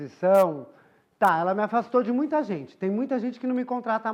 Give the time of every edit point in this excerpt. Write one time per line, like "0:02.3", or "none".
none

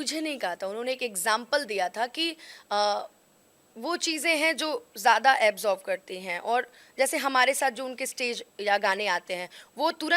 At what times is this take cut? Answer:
0:04.0

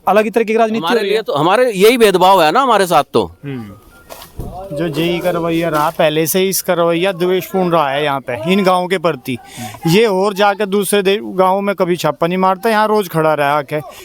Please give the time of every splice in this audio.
none

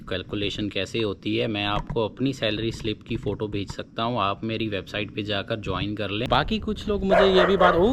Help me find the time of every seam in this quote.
0:06.2

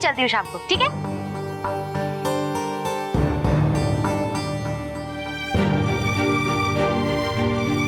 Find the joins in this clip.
none

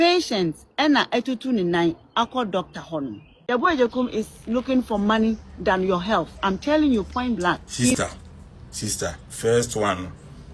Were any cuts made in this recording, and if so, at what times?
0:03.3

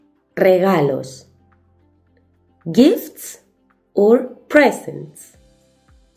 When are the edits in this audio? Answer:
0:05.2

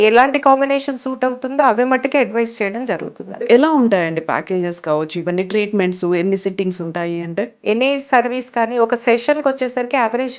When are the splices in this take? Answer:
0:03.5
0:07.5

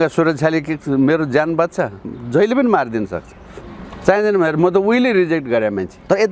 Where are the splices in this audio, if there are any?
none

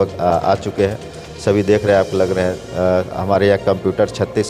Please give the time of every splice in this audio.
none

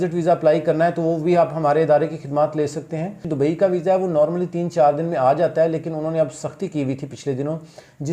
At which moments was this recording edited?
0:03.3

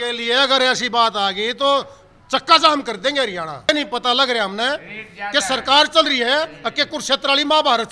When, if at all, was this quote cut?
0:03.7

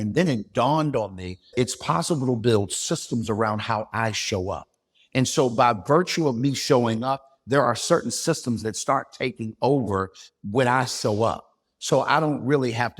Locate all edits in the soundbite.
0:01.5

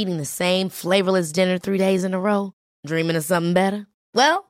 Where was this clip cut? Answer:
none

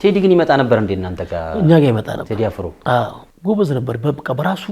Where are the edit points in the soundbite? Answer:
0:03.3

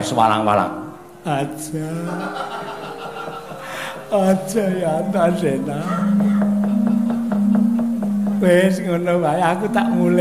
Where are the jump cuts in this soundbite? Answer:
0:08.8

